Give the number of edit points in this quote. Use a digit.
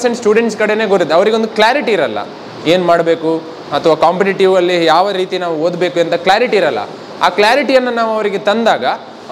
0